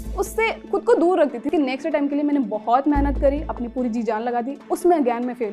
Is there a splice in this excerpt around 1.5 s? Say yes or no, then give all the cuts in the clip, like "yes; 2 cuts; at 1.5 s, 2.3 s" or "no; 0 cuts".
yes; 1 cut; at 1.5 s